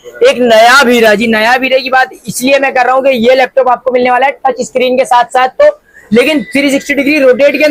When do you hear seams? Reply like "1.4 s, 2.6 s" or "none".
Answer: none